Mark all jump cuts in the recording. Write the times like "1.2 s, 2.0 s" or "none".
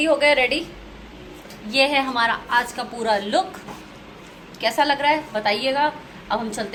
none